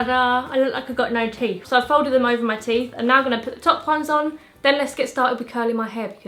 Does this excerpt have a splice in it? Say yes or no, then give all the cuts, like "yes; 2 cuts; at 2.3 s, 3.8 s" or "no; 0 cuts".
no; 0 cuts